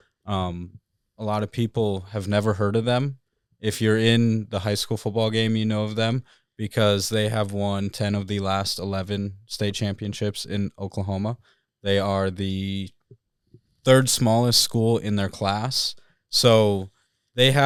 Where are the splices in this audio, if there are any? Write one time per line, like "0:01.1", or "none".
none